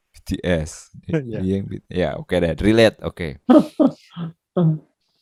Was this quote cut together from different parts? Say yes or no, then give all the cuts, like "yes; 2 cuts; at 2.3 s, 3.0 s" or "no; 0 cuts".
no; 0 cuts